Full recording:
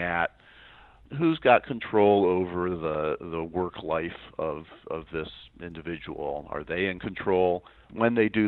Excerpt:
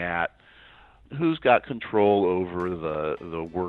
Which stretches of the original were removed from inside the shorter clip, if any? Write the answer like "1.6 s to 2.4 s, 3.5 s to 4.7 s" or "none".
none